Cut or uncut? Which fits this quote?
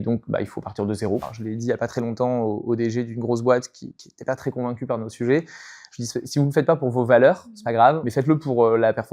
cut